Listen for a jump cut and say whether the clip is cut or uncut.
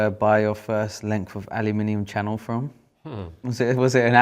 uncut